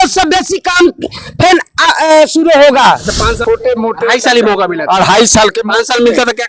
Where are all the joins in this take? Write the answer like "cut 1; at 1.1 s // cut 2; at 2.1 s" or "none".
cut 1; at 3.4 s